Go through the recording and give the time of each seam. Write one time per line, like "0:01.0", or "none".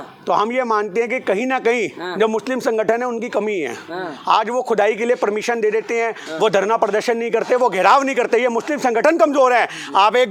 none